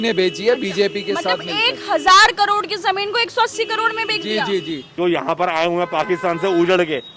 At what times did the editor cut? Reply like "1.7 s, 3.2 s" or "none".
4.9 s